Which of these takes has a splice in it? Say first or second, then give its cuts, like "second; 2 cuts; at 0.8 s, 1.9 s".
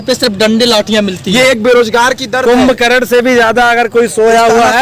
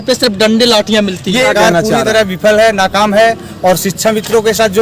second; 1 cut; at 1.5 s